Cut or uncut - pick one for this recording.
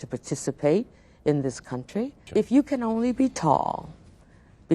cut